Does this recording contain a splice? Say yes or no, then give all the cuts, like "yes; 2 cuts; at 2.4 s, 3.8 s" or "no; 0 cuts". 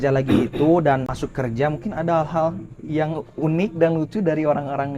yes; 1 cut; at 1.2 s